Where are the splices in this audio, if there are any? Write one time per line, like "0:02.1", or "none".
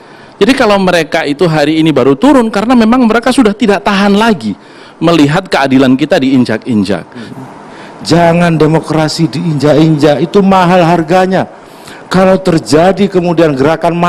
0:07.3